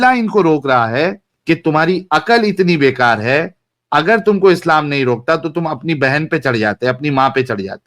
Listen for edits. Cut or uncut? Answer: cut